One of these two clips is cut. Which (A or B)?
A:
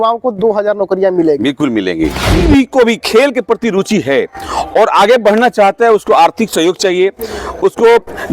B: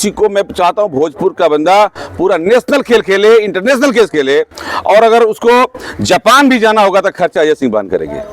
A